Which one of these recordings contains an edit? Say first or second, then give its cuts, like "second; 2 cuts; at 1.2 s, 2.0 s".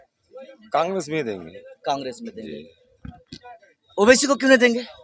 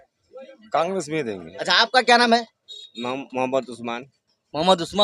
second; 1 cut; at 1.5 s